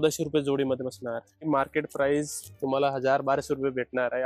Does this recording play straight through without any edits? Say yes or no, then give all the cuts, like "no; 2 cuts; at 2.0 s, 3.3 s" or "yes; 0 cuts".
no; 1 cut; at 1.4 s